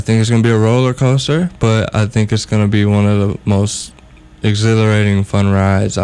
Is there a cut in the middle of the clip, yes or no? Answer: no